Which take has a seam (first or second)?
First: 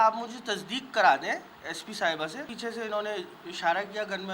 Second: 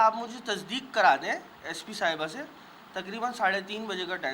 first